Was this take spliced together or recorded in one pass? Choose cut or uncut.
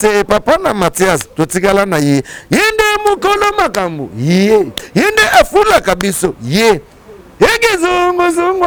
uncut